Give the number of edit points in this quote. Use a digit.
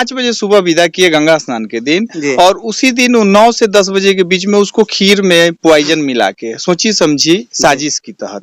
0